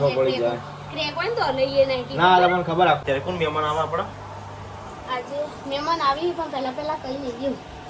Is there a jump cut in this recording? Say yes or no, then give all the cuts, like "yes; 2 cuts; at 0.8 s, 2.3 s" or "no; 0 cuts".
yes; 1 cut; at 3.0 s